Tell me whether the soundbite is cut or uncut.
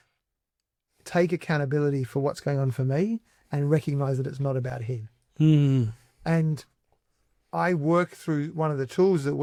uncut